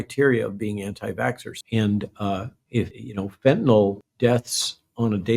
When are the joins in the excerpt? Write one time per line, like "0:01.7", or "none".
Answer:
0:01.5
0:03.0
0:04.1